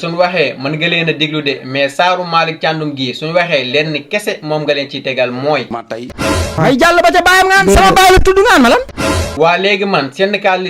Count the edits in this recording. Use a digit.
2